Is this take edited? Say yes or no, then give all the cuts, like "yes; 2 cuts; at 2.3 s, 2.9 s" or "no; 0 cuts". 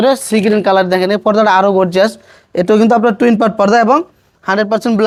no; 0 cuts